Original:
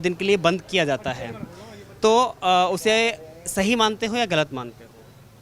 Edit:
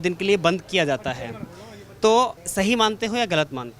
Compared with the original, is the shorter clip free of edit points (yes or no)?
no